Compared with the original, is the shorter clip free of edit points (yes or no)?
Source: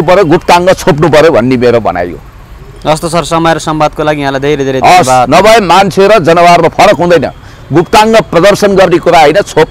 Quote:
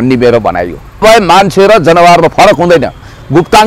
no